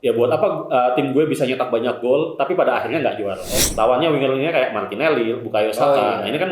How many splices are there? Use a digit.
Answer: 1